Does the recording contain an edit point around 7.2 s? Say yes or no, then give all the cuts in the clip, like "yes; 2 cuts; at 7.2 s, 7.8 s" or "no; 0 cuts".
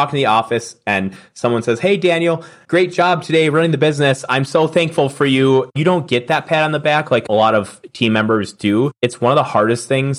yes; 4 cuts; at 2.5 s, 5.7 s, 7.2 s, 8.9 s